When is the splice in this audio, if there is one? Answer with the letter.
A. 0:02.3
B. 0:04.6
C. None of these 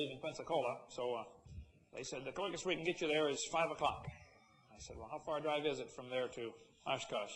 A